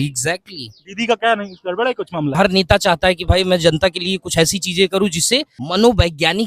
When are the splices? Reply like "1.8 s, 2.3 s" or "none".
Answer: 2.4 s, 5.6 s